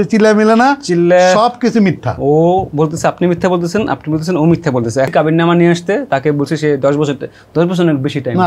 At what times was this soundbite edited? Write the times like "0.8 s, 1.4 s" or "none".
2.1 s, 5.1 s